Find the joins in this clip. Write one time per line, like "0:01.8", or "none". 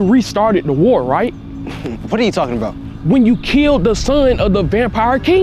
0:01.5